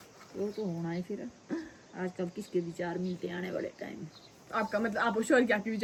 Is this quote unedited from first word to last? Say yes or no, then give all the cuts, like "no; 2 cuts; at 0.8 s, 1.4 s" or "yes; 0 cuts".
yes; 0 cuts